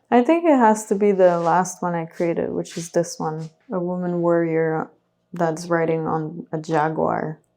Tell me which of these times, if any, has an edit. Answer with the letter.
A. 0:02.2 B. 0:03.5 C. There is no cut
B